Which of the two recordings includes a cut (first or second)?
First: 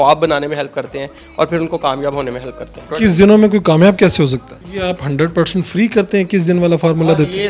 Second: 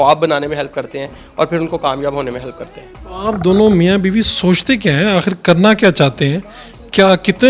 first